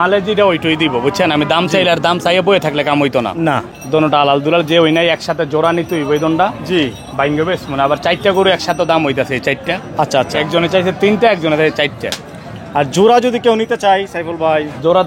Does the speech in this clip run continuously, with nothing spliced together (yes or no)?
no